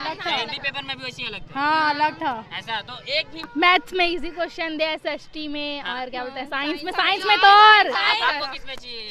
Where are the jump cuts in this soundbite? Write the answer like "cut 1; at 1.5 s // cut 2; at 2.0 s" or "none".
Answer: cut 1; at 3.5 s